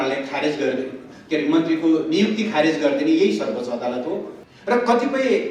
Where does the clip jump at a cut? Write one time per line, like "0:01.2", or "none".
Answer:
0:04.3